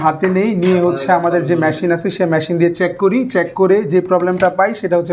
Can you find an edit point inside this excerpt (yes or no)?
no